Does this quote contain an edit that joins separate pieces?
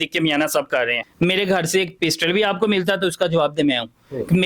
yes; 1 cut; at 1.0 s

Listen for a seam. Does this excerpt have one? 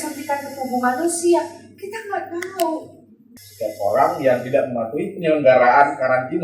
yes; 1 cut; at 3.2 s

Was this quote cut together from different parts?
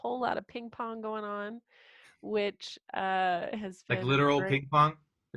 no; 0 cuts

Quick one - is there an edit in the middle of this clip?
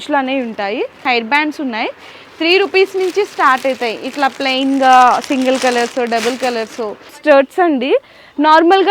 yes; 2 cuts; at 1.0 s, 7.2 s

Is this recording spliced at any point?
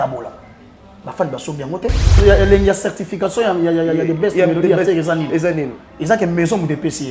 yes; 1 cut; at 2.2 s

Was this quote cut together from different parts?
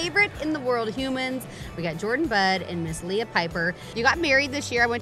yes; 1 cut; at 3.9 s

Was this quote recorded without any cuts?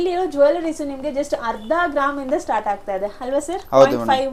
yes; 0 cuts

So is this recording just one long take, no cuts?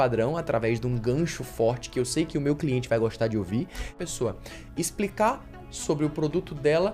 no; 1 cut; at 3.9 s

